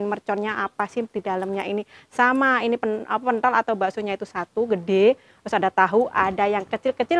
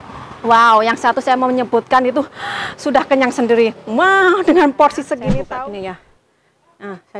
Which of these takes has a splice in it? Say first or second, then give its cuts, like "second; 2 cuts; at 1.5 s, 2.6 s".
second; 1 cut; at 5.3 s